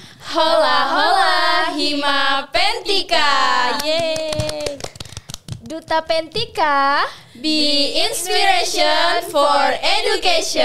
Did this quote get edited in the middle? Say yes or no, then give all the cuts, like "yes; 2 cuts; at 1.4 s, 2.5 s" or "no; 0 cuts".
no; 0 cuts